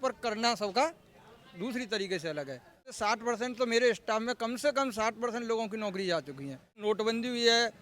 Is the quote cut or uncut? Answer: cut